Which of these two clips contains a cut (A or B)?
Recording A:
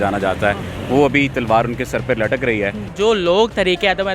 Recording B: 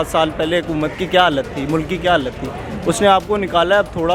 A